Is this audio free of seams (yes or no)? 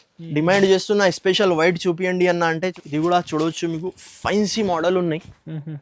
no